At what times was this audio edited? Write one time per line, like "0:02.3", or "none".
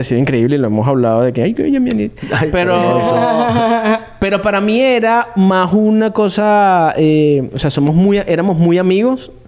none